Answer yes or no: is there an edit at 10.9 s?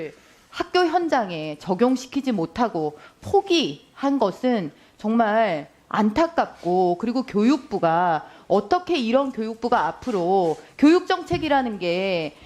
no